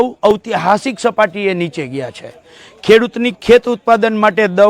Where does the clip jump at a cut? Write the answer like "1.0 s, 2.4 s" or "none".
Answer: none